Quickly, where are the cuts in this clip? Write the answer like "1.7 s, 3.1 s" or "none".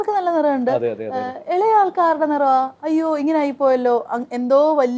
none